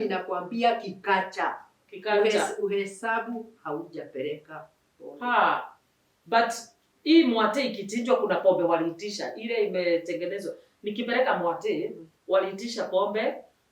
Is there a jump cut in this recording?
no; 0 cuts

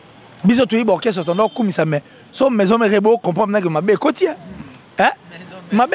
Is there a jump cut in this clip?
no; 0 cuts

